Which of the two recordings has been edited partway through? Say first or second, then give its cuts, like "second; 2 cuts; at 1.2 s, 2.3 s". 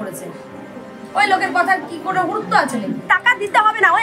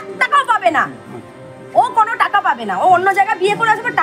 first; 1 cut; at 3.0 s